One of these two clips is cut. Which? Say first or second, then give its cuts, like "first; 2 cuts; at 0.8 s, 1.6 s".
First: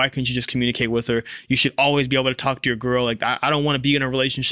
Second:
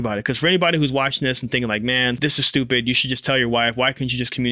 second; 1 cut; at 2.2 s